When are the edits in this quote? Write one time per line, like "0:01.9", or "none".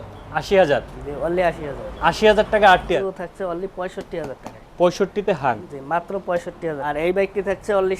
0:03.0
0:06.9